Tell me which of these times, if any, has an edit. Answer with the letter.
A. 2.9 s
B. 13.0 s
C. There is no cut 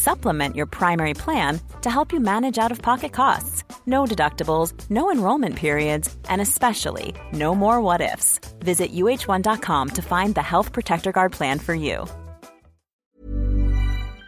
B